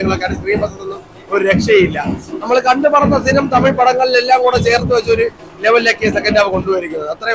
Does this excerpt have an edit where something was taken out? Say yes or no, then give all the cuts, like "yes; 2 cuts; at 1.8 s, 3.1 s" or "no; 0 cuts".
no; 0 cuts